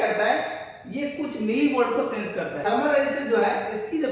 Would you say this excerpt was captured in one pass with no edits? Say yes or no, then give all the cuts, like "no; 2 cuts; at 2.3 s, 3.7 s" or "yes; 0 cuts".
no; 1 cut; at 2.6 s